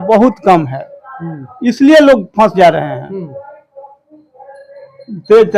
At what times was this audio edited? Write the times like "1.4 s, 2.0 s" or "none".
none